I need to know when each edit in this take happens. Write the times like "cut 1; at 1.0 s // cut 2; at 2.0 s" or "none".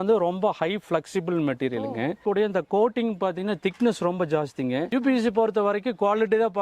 cut 1; at 2.2 s // cut 2; at 4.9 s

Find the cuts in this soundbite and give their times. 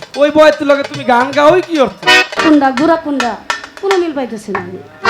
cut 1; at 2.4 s

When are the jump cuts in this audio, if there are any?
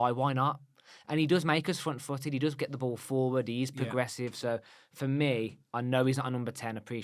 none

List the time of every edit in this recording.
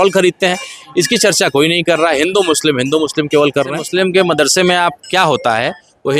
cut 1; at 3.8 s

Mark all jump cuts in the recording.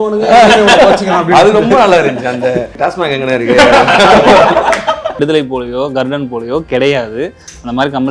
cut 1; at 2.7 s // cut 2; at 5.2 s

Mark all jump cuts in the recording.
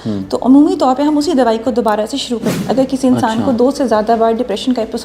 cut 1; at 2.6 s

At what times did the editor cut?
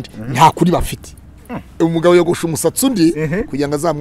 cut 1; at 1.8 s

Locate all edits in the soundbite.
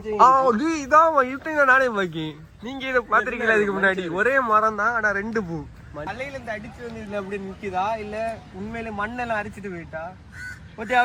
cut 1; at 6.1 s

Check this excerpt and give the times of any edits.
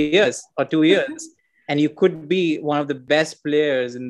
cut 1; at 3.0 s

